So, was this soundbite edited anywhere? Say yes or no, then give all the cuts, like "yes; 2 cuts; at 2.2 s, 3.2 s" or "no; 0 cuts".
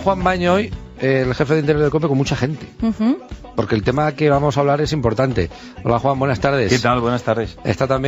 no; 0 cuts